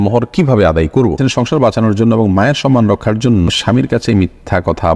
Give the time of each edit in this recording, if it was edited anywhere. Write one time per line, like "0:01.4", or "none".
0:01.2
0:03.5